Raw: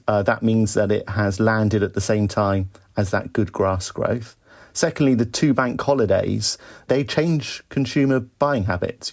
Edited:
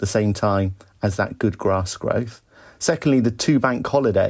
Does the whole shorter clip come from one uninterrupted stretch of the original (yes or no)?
yes